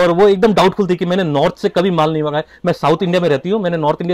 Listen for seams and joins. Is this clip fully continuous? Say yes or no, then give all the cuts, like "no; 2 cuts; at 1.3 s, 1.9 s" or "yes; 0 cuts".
yes; 0 cuts